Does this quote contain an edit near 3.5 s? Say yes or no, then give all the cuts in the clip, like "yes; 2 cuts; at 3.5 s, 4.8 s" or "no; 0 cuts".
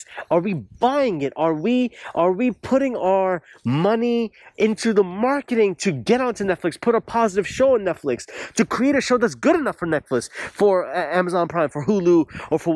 no; 0 cuts